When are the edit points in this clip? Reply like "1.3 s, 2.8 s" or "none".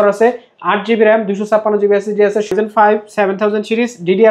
2.5 s